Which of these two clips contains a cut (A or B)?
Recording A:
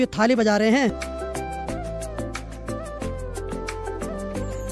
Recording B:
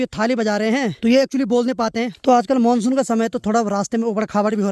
B